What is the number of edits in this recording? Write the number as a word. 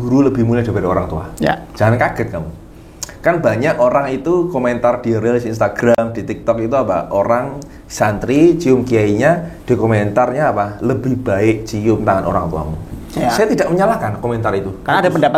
zero